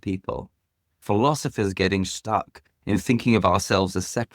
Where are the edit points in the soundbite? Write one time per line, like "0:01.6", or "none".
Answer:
0:01.0